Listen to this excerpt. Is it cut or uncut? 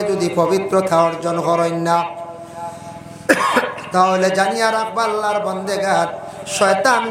uncut